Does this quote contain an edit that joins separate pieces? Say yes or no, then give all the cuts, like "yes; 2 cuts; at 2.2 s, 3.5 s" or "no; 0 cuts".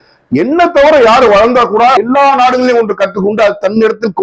yes; 1 cut; at 2.0 s